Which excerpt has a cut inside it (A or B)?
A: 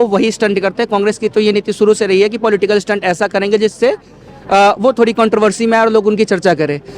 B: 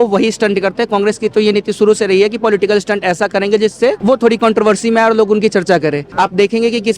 B